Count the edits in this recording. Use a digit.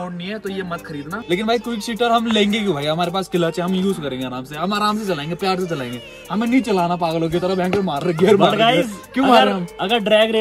1